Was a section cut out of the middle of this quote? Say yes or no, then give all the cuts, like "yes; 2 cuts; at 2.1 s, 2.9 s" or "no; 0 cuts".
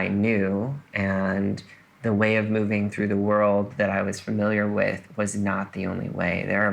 no; 0 cuts